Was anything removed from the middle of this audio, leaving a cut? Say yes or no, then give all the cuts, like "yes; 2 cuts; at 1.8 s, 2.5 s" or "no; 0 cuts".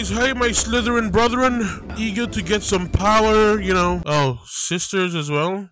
no; 0 cuts